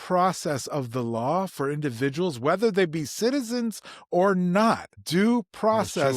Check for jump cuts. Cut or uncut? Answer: cut